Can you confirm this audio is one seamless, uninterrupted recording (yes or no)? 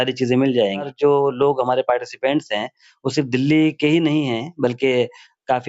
no